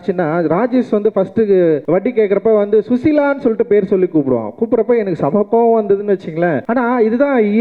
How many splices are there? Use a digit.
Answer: 2